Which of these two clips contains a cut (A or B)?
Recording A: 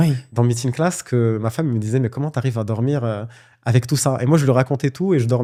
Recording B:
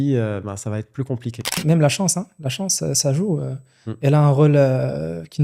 B